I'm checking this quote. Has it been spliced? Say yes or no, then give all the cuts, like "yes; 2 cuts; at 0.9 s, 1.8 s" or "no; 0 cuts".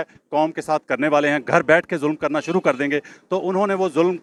no; 0 cuts